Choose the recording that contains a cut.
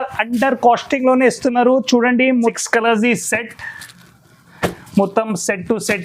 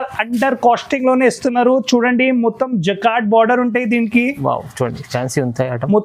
first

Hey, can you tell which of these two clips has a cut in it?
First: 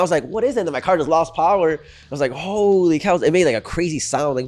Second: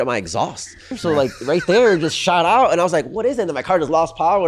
second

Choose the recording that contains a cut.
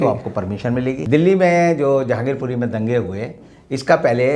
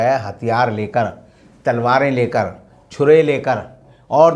first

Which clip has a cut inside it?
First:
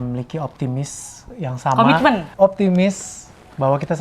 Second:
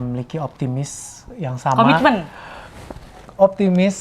first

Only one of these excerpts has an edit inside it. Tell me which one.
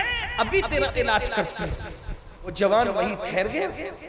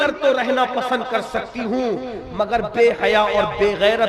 first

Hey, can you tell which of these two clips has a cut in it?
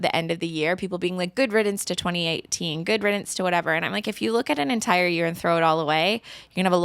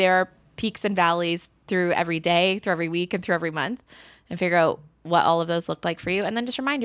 first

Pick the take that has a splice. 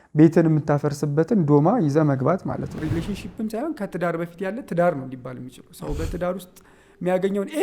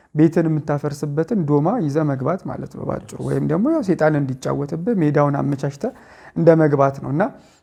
first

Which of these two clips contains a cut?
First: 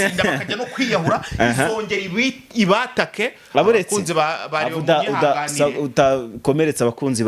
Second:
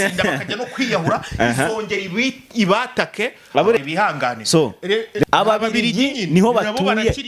second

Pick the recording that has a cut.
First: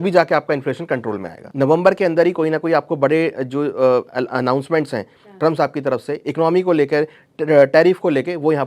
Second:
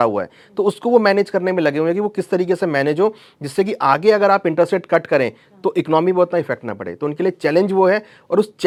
first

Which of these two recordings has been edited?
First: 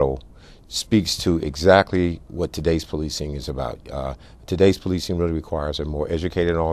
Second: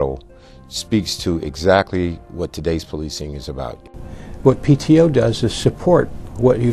second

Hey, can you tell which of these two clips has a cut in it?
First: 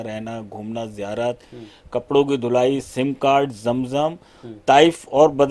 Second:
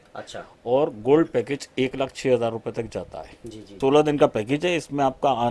second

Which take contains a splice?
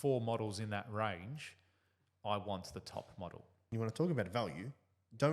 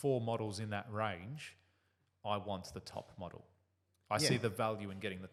first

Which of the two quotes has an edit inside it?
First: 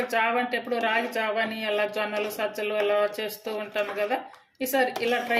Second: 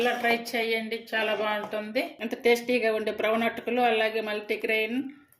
second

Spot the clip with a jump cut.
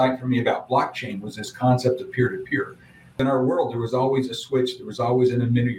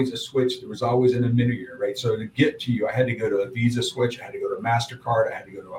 first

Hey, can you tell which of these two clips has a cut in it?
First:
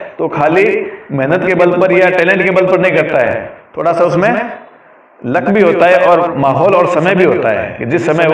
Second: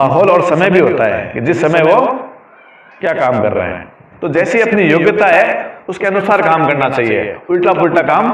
second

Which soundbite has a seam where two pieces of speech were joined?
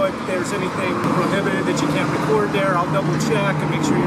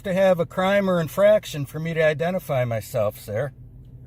first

